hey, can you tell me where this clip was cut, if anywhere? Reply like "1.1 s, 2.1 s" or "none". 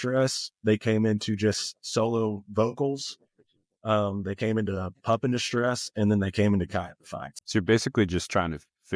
7.4 s